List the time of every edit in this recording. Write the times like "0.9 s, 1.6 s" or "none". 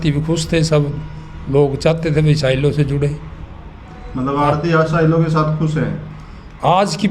none

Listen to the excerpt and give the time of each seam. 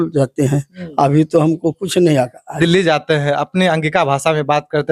2.6 s

